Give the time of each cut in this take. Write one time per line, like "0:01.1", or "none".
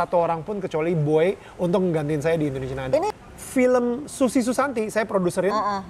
0:03.1